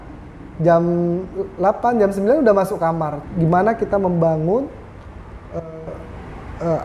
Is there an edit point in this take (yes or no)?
yes